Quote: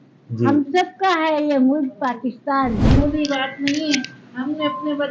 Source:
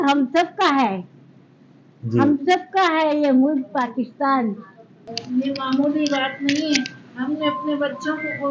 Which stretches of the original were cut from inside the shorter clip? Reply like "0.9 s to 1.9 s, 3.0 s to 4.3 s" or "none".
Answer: 4.6 s to 5.7 s